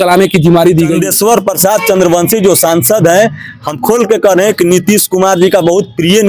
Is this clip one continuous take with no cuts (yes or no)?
no